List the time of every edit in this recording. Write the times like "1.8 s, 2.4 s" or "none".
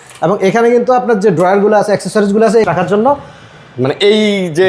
2.6 s

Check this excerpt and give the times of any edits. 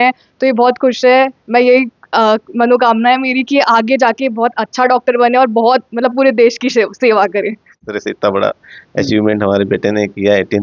7.8 s

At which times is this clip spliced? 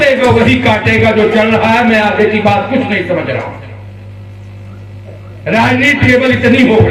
none

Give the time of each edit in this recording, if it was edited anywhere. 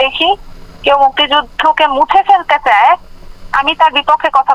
none

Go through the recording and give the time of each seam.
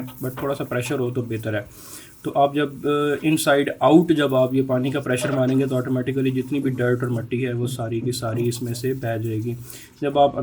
none

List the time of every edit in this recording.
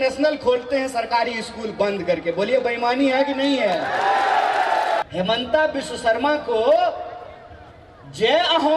5.0 s

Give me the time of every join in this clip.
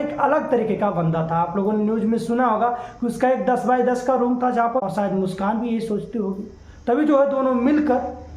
4.8 s

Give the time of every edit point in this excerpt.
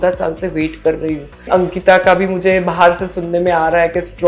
1.4 s

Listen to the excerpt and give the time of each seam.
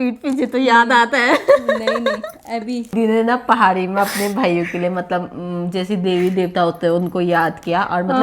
2.9 s

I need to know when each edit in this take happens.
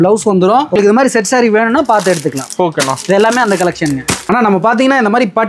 0.8 s, 4.2 s

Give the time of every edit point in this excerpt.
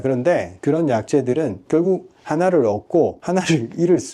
3.2 s

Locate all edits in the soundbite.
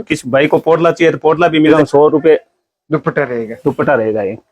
1.7 s

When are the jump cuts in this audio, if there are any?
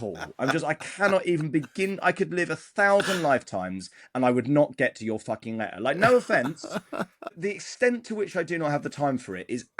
7.3 s

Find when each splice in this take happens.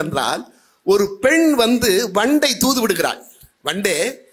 none

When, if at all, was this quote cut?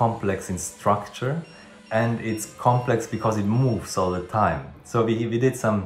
none

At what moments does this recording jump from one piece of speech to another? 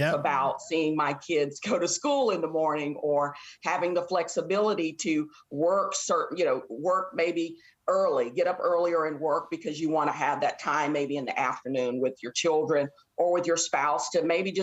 none

